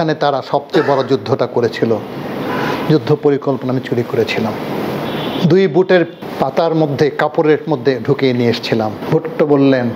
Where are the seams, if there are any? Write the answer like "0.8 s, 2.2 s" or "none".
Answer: 5.1 s, 6.2 s, 9.0 s